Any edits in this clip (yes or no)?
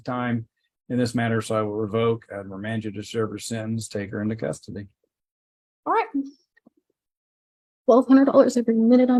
no